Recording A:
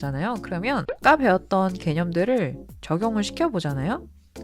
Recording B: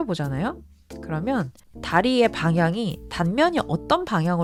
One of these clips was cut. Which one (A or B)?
A